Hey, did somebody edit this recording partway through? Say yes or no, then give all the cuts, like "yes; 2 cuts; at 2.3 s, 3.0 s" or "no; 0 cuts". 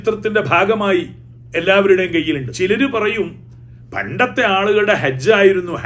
yes; 1 cut; at 2.5 s